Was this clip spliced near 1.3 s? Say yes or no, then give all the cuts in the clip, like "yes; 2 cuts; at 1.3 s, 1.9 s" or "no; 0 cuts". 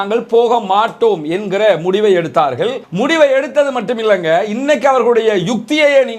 no; 1 cut; at 2.8 s